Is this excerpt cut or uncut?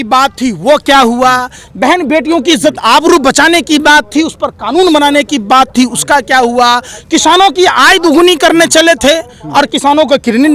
uncut